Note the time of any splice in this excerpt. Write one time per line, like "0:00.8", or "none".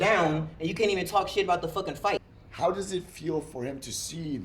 0:02.2